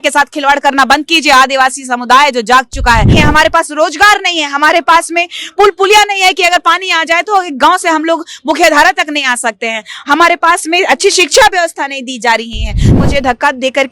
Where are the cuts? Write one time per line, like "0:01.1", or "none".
0:03.1
0:12.9